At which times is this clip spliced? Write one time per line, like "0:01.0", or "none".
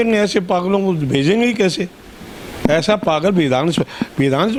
none